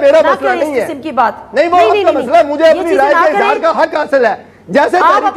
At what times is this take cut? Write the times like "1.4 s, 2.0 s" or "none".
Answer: none